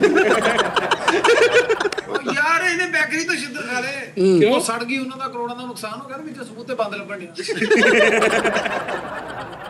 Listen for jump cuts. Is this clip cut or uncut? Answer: cut